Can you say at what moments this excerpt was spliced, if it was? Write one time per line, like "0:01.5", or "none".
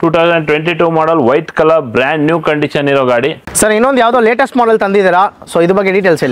0:03.4